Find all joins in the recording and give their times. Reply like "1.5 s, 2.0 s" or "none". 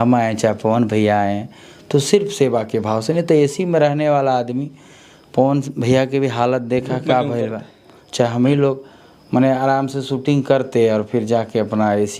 none